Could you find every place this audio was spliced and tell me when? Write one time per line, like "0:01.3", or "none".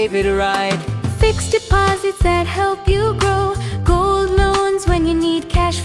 none